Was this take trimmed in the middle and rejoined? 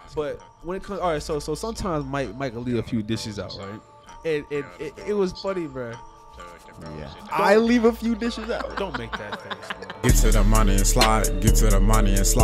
yes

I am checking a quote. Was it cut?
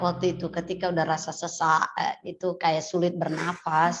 no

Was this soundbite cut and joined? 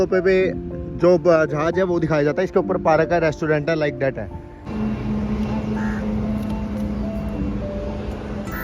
yes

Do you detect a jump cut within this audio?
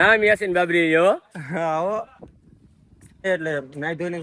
yes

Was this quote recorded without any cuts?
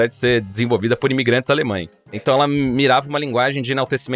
no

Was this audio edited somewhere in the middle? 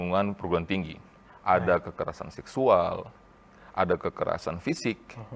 no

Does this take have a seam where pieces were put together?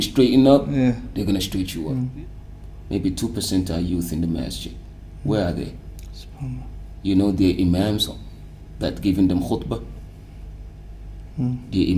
yes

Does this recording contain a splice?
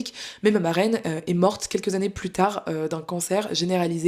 no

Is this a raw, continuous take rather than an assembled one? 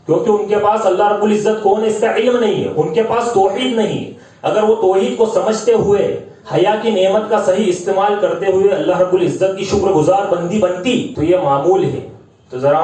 no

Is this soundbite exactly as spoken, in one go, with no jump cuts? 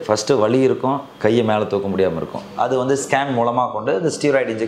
no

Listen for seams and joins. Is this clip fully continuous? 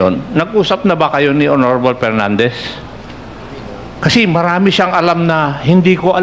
yes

